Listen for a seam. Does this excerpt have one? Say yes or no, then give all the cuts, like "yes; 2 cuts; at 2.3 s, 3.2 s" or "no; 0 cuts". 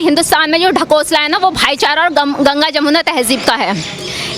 no; 0 cuts